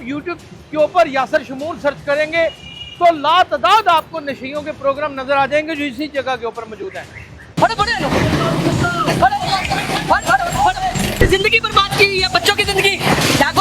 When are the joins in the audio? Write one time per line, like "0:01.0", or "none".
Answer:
0:11.2